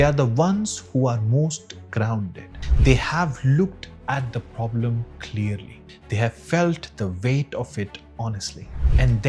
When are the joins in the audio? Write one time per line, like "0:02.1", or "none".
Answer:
none